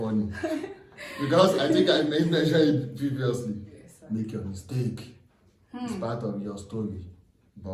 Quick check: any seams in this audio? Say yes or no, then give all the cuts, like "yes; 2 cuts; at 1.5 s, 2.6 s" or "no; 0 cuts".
no; 0 cuts